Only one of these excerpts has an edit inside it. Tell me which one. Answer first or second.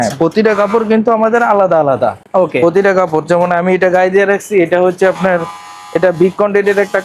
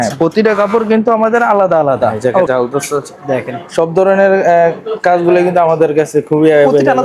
second